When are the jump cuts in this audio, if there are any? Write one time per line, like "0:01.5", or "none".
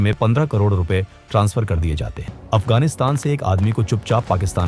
0:02.3